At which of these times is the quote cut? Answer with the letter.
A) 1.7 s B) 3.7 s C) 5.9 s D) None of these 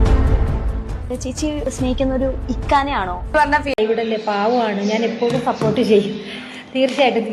B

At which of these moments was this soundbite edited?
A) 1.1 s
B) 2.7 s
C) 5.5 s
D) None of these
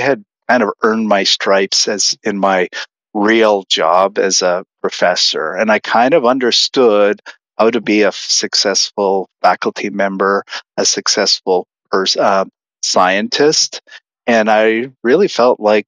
D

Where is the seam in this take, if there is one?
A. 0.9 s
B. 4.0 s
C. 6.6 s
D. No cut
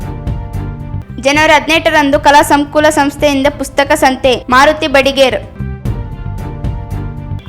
A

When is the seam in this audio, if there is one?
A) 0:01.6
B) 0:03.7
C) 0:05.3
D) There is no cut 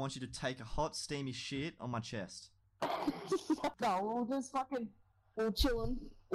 B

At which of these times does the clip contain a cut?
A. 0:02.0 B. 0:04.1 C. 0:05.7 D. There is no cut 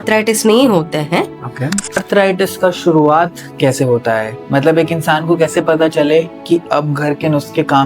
A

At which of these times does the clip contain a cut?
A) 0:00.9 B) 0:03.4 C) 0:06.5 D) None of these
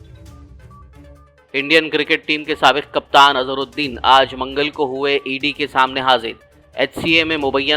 A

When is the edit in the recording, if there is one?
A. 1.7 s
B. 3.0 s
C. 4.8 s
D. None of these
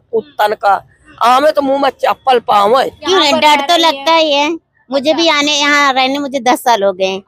B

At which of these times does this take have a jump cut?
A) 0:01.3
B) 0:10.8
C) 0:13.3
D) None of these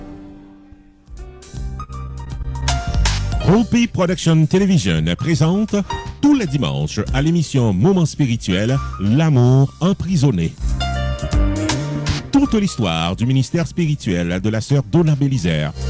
A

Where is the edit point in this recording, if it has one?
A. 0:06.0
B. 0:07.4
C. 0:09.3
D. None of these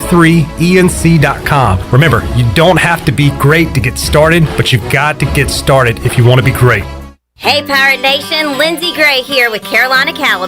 B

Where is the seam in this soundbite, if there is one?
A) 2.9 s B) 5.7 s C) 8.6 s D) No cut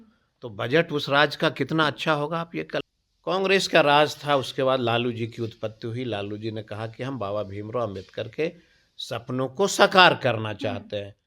A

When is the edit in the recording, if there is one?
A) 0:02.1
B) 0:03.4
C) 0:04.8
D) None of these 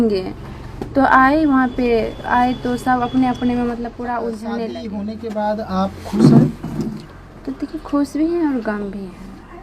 C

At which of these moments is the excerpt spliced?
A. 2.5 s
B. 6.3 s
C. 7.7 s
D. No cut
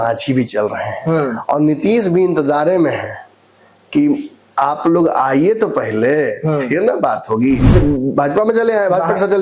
C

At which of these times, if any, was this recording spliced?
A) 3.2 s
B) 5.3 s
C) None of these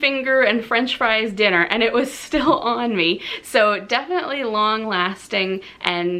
C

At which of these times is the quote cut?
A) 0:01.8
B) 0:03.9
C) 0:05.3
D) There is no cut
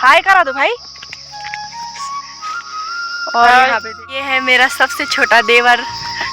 B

